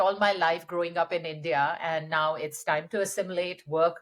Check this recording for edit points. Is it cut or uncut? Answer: uncut